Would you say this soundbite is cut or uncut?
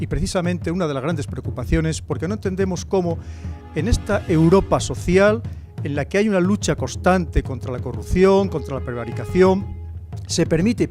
uncut